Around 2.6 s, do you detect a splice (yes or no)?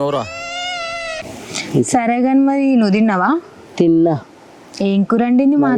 no